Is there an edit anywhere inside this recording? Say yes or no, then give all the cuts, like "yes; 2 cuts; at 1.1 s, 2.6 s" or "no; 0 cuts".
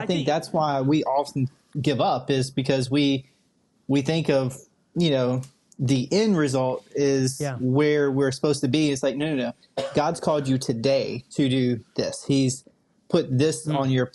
no; 0 cuts